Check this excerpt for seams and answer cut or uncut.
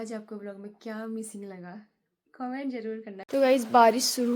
cut